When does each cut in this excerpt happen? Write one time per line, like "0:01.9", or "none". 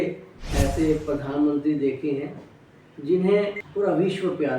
0:03.6